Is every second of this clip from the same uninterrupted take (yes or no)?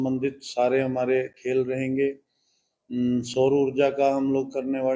yes